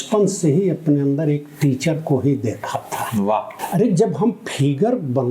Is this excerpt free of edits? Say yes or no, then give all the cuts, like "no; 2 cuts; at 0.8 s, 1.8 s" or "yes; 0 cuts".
no; 1 cut; at 3.5 s